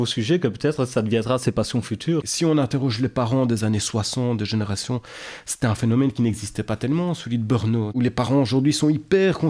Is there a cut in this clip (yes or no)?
yes